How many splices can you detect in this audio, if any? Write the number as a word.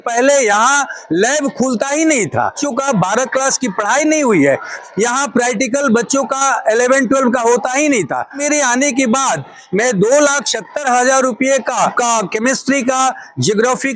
four